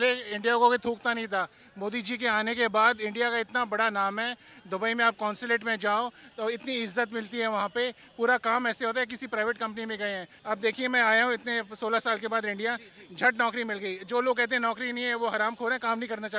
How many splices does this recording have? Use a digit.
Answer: 1